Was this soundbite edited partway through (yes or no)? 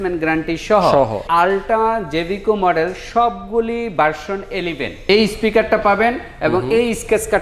yes